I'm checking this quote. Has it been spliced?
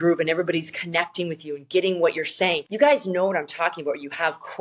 yes; 1 cut; at 2.7 s

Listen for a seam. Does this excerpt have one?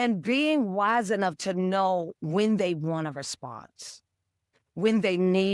no; 0 cuts

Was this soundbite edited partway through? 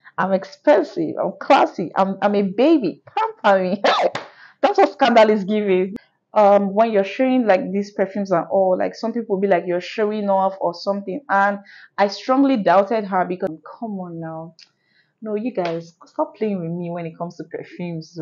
yes; 2 cuts; at 5.9 s, 13.5 s

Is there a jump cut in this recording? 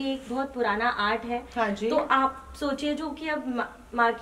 no; 0 cuts

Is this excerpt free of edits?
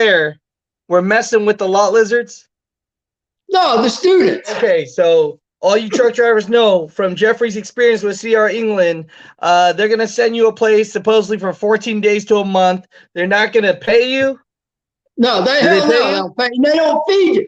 no; 1 cut; at 4.6 s

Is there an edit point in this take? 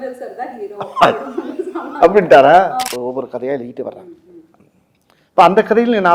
yes; 1 cut; at 2.9 s

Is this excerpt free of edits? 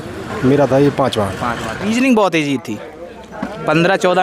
no; 1 cut; at 1.8 s

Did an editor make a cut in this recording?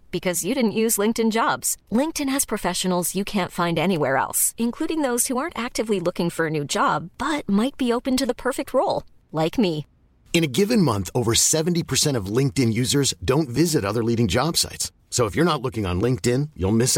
no; 0 cuts

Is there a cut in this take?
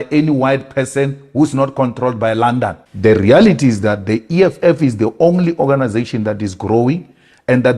yes; 1 cut; at 2.8 s

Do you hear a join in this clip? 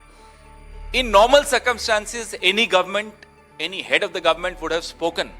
yes; 1 cut; at 0.9 s

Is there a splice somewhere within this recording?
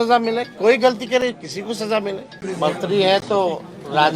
yes; 1 cut; at 2.4 s

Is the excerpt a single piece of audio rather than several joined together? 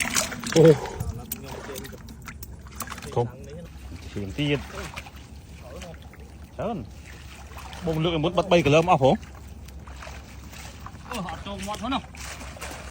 yes; 0 cuts

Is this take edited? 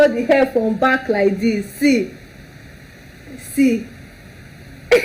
no; 0 cuts

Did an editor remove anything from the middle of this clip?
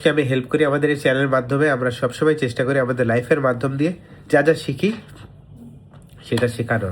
no; 0 cuts

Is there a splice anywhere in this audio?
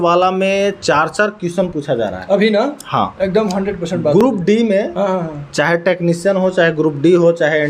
no; 0 cuts

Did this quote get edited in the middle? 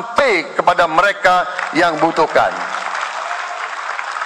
no; 0 cuts

